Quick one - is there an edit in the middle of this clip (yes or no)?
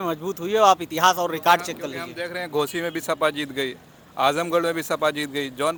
no